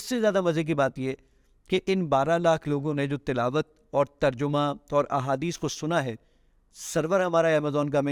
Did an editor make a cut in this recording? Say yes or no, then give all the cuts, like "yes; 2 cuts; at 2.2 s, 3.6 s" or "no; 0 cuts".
no; 0 cuts